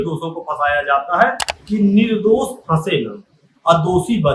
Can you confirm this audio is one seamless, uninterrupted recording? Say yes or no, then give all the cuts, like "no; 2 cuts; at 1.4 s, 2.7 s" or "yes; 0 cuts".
no; 1 cut; at 1.5 s